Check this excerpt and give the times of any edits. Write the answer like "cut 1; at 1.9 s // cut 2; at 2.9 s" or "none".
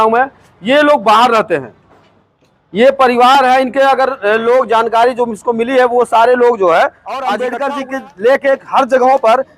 cut 1; at 7.3 s